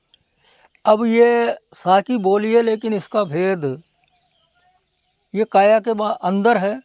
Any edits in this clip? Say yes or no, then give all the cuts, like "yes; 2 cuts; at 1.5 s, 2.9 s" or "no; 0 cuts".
no; 0 cuts